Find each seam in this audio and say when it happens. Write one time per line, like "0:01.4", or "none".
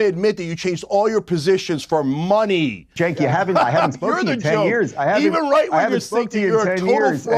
0:02.9